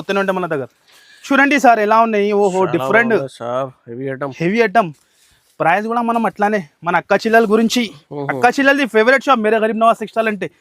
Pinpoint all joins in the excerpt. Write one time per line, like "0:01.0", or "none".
0:01.2